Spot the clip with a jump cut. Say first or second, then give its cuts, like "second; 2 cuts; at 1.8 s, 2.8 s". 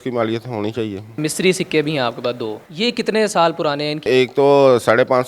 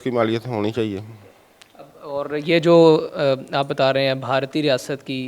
first; 2 cuts; at 1.2 s, 4.1 s